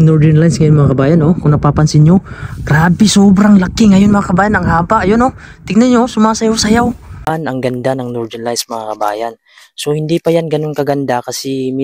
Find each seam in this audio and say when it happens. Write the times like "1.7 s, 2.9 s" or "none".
7.1 s